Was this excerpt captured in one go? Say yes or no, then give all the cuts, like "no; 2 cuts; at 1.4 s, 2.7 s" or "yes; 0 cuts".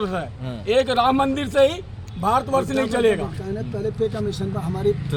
yes; 0 cuts